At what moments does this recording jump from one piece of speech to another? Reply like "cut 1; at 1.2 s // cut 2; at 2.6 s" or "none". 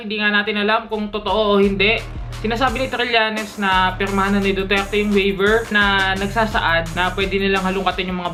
none